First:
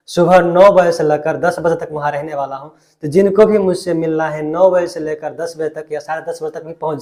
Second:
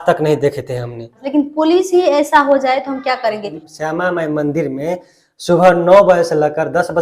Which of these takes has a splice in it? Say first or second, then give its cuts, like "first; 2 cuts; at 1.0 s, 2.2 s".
second; 2 cuts; at 1.2 s, 3.7 s